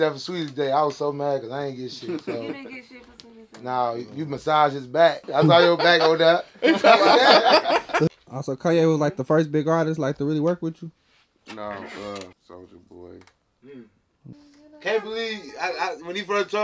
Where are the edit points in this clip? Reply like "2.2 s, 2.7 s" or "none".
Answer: 5.2 s, 8.1 s, 12.4 s, 14.3 s